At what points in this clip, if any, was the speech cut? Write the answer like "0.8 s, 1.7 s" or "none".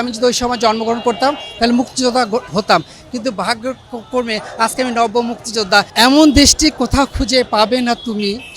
5.9 s